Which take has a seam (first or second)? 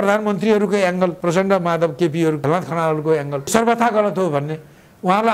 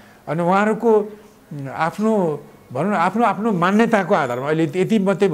first